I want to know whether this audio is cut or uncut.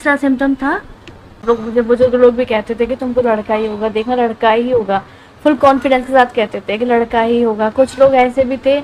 cut